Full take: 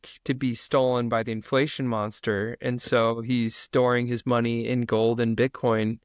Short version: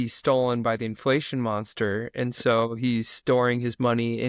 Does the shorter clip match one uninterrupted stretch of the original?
yes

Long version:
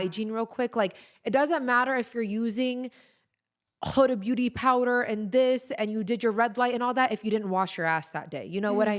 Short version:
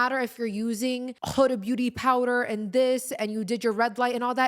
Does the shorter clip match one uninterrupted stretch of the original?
no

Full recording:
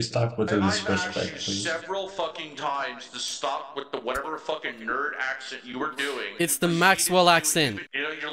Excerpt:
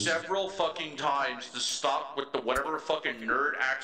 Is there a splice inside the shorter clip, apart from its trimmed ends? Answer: no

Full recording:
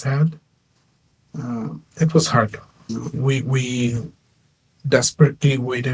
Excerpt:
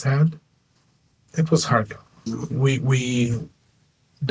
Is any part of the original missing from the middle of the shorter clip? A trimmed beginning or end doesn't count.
yes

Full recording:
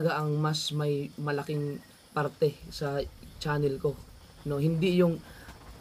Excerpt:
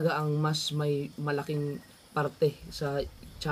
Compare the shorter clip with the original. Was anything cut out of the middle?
no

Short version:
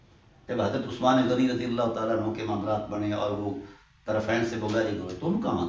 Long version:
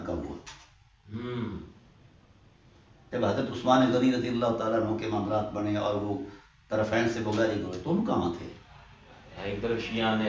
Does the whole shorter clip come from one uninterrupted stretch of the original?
yes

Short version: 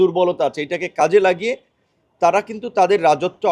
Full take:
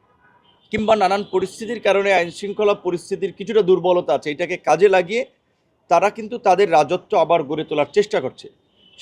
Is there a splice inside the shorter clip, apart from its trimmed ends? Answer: no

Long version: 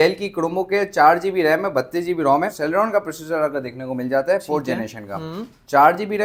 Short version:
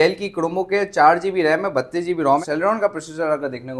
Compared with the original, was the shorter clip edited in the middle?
yes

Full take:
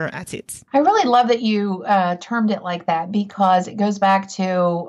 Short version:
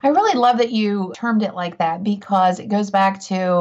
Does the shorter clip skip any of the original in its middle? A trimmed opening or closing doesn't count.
yes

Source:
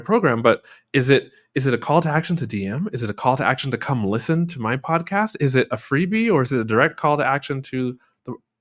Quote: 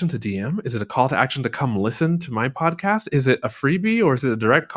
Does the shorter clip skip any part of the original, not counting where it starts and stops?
no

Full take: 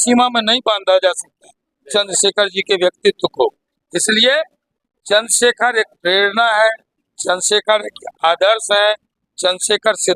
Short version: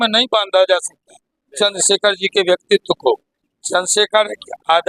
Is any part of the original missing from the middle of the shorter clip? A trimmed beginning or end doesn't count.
yes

